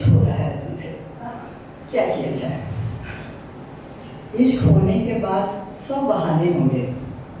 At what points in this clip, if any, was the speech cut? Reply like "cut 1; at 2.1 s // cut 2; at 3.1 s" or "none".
none